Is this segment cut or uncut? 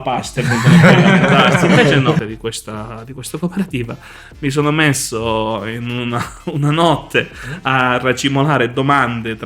cut